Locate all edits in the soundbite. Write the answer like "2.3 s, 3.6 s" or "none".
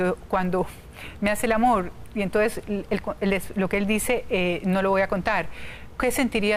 none